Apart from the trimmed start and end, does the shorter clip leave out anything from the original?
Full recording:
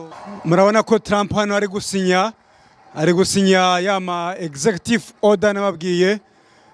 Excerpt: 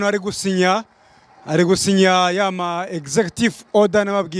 no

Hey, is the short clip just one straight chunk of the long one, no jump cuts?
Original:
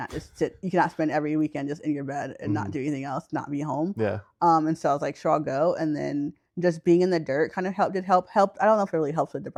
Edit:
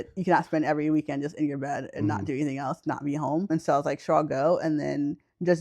no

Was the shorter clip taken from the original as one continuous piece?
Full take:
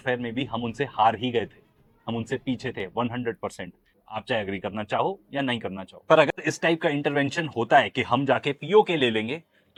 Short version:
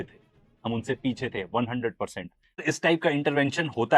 no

